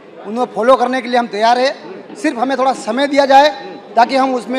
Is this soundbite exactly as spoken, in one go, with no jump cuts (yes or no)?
yes